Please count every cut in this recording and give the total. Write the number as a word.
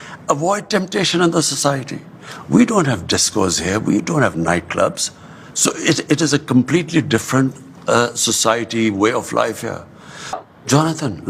one